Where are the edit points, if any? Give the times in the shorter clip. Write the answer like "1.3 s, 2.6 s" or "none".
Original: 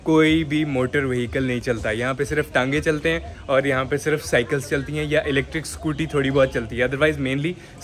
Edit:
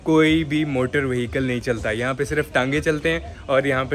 none

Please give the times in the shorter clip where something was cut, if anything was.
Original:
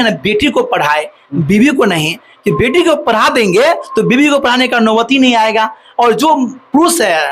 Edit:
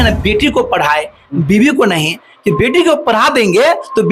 none

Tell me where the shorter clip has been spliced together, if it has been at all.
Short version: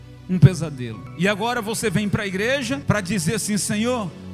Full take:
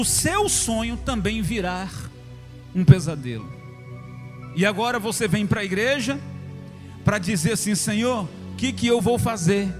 1.0 s, 2.8 s

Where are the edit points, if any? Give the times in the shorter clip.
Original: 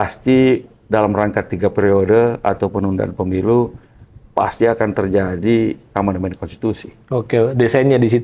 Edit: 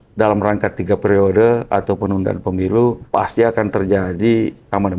3.0 s

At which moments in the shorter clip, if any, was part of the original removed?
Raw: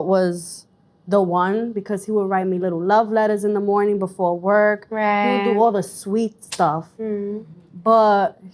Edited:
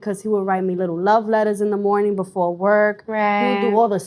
none

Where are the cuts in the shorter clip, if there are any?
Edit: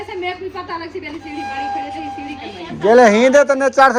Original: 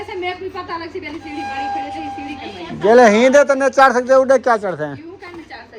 none

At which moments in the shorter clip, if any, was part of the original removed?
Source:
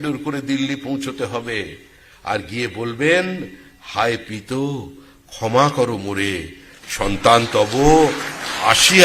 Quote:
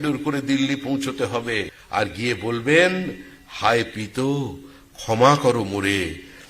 1.8 s

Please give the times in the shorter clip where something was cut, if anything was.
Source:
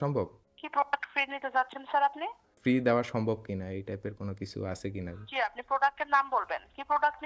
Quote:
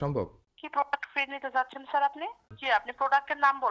2.5 s

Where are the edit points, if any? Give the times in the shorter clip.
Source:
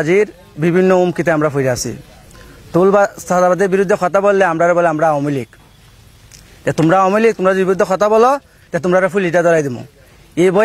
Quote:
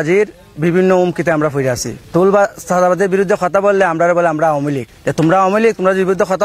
1.9 s, 4.9 s

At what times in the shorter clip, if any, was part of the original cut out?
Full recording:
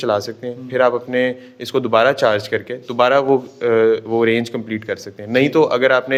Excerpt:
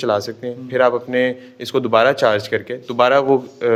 none

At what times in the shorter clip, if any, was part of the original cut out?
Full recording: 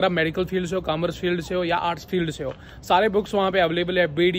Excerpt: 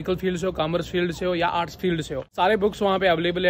2.2 s

